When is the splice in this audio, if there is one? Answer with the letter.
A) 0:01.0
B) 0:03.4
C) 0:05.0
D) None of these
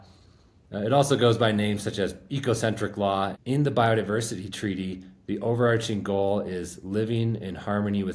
B